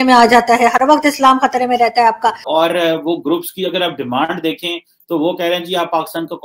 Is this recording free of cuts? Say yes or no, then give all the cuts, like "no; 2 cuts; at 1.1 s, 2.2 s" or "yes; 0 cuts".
no; 1 cut; at 2.4 s